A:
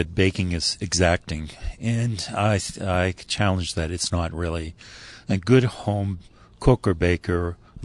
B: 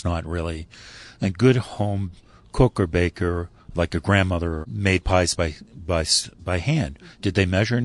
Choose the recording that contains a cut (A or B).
B